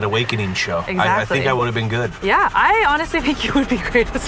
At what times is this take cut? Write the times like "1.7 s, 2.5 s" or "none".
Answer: 0.9 s, 2.1 s